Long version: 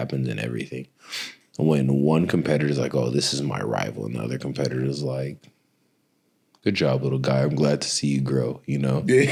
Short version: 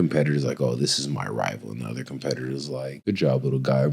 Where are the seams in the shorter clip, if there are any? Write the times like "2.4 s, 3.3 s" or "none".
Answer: 3.0 s